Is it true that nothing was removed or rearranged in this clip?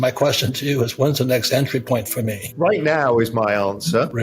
no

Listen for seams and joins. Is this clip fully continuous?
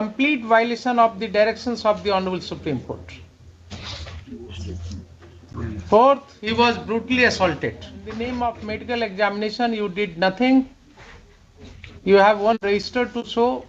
no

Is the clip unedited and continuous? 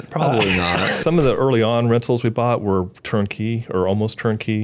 no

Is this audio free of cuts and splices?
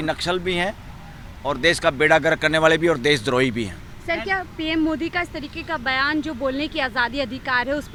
yes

